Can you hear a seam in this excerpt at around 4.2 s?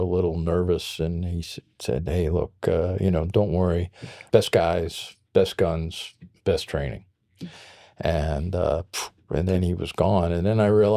yes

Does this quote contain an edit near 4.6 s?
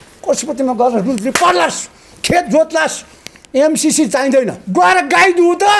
yes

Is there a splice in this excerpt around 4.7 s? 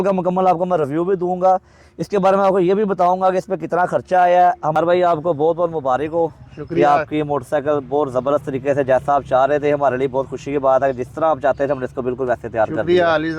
yes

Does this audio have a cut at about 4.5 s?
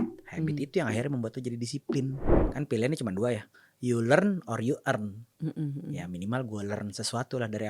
no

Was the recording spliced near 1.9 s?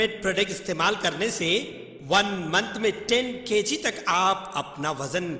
no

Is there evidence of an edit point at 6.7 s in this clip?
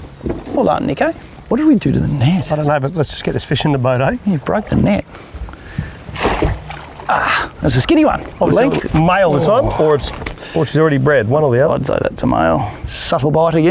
no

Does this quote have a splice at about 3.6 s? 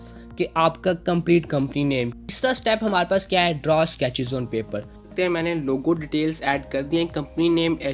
no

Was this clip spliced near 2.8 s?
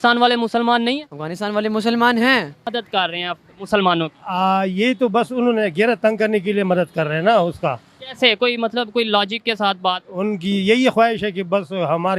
yes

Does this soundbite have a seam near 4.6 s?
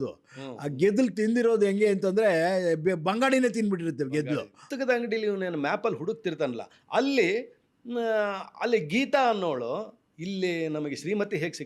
yes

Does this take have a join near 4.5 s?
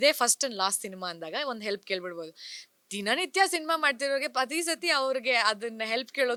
no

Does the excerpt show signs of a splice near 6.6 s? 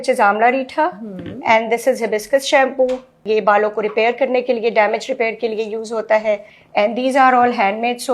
yes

